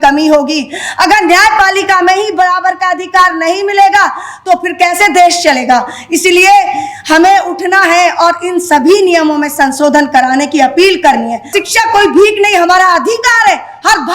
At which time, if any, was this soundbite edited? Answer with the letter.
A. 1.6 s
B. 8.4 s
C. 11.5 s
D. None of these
C